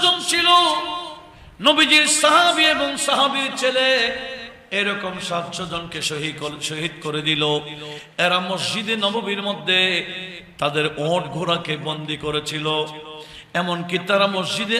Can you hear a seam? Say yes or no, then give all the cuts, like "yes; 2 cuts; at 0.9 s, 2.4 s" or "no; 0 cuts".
no; 0 cuts